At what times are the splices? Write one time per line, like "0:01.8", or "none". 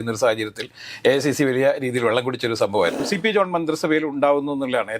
0:03.1